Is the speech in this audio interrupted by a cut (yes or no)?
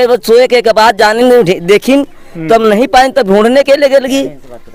no